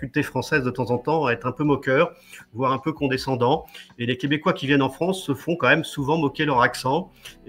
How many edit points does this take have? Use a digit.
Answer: 0